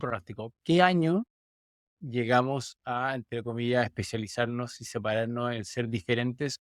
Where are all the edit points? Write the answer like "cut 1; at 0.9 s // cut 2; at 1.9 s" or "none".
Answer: none